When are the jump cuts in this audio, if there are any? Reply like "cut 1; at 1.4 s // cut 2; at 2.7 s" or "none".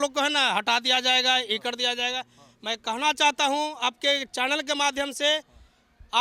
none